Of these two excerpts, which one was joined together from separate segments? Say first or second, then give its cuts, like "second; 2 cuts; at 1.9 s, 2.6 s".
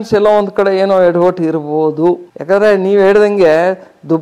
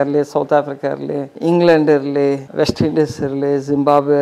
second; 2 cuts; at 1.3 s, 2.5 s